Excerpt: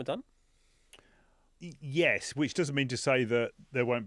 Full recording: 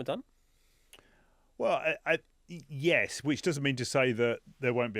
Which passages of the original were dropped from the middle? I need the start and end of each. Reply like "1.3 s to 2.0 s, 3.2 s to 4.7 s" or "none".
1.4 s to 2.3 s